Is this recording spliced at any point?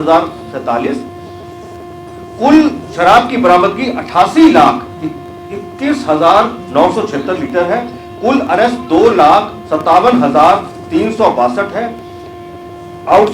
no; 0 cuts

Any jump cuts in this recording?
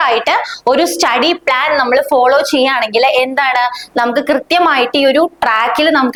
no; 0 cuts

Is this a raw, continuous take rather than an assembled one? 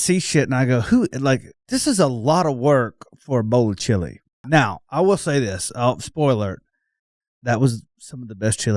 no; 2 cuts; at 1.5 s, 4.4 s

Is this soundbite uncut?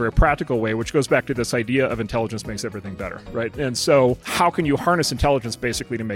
no; 2 cuts; at 3.5 s, 4.2 s

